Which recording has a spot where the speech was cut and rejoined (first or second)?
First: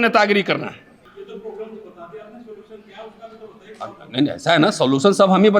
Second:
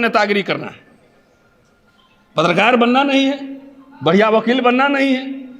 first